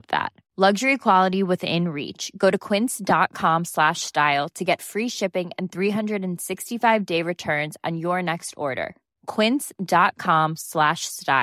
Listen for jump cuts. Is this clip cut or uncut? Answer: uncut